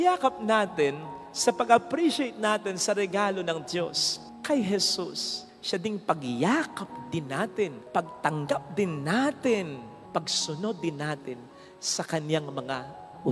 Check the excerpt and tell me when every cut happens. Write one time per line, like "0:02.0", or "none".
none